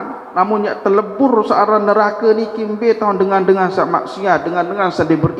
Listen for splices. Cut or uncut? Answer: uncut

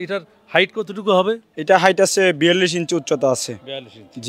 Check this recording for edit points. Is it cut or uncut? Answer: uncut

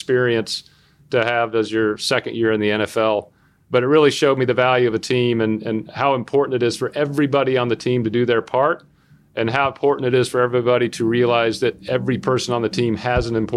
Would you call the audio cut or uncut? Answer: uncut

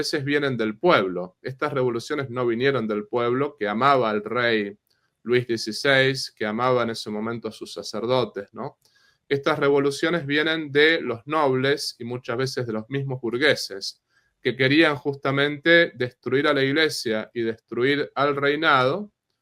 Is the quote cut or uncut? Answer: uncut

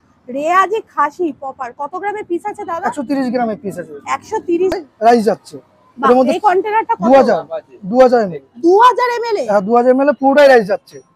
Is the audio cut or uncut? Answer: cut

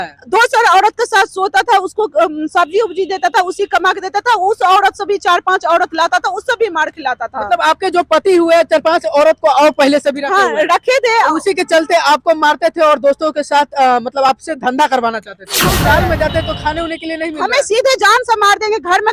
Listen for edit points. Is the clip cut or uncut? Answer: cut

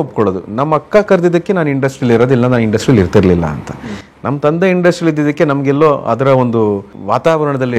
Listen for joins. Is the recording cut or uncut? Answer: uncut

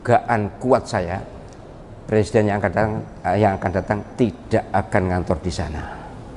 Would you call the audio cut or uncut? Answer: uncut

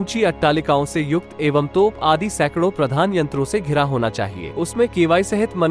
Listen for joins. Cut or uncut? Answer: cut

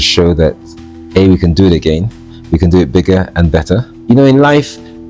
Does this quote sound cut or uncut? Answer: cut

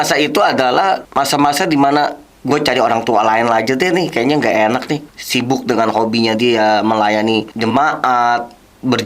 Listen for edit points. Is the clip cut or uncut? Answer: cut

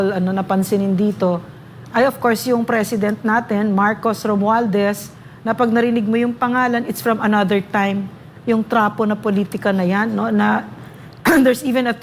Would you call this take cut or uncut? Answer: uncut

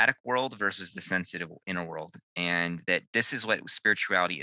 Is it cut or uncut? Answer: uncut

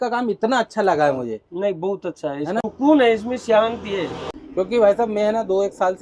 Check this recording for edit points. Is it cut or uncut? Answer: uncut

